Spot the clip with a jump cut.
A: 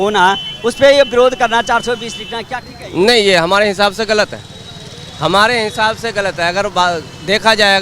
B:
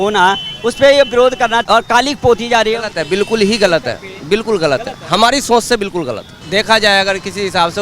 B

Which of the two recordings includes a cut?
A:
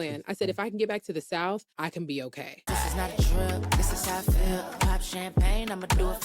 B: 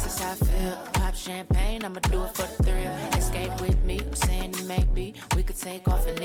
A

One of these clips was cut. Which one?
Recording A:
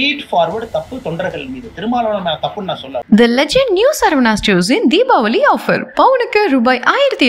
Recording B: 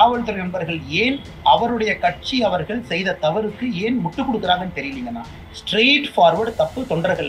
A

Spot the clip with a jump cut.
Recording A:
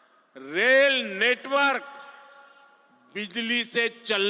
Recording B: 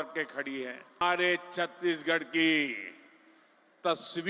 B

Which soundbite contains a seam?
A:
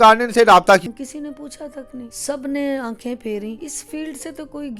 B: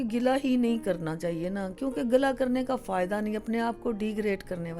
A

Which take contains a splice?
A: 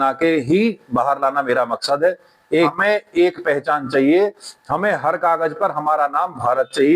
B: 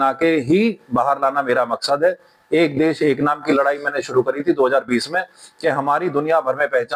A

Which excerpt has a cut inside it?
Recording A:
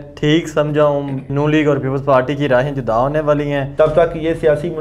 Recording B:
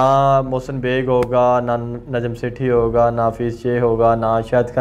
A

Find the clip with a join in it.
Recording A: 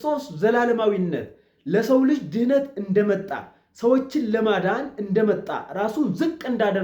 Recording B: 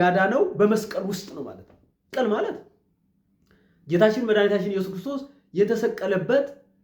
B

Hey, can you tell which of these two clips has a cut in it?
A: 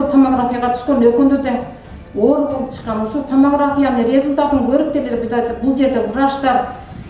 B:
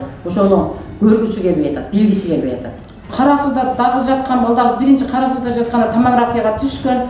B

